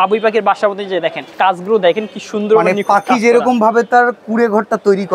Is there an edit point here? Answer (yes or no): yes